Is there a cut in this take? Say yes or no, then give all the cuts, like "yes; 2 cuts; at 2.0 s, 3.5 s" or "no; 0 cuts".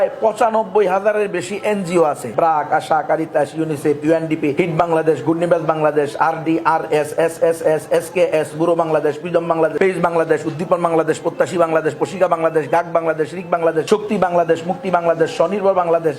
yes; 4 cuts; at 2.2 s, 4.5 s, 9.7 s, 13.9 s